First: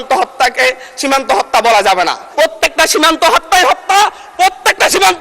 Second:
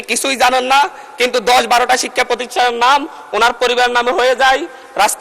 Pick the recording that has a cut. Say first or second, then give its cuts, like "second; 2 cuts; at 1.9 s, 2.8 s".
first; 1 cut; at 2.2 s